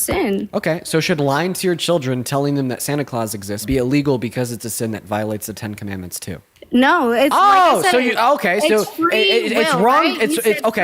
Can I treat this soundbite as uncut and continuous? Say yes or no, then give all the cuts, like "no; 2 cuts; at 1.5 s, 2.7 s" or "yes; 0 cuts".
no; 2 cuts; at 3.6 s, 6.5 s